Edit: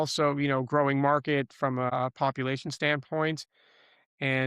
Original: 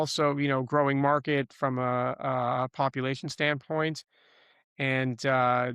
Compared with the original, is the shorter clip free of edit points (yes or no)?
no